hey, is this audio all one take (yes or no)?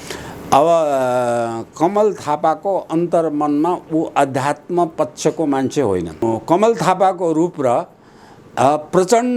no